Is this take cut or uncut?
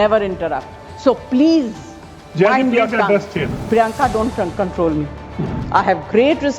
cut